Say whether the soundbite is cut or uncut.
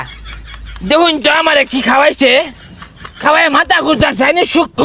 uncut